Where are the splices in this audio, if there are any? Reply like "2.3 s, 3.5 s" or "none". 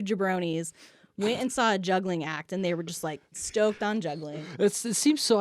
3.4 s, 4.3 s

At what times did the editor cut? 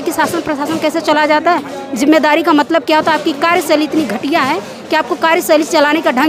none

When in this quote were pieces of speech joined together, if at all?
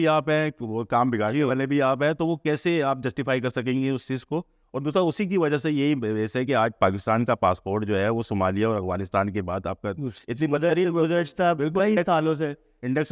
none

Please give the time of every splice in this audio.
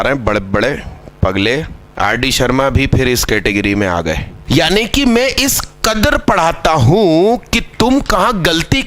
1.9 s, 4.3 s

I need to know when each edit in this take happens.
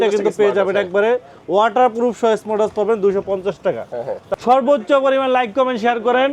4.2 s

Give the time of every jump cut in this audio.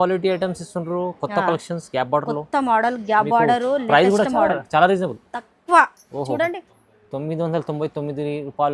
6.8 s

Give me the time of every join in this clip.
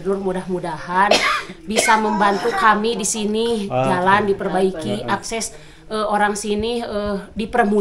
none

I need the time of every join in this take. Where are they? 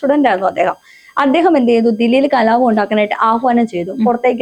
none

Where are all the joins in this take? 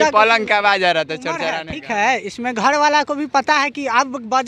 1.5 s

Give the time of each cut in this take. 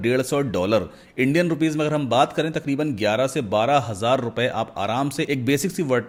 none

